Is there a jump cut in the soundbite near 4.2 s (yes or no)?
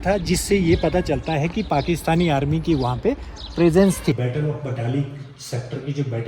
yes